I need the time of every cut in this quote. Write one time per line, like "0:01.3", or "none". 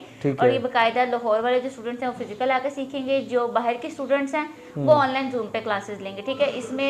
none